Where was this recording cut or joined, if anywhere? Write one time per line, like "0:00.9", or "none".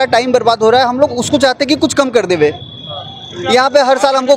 none